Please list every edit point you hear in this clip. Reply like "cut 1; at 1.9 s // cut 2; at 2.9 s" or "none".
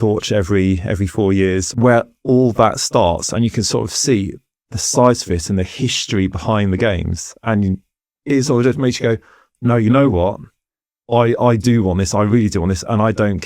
cut 1; at 1.7 s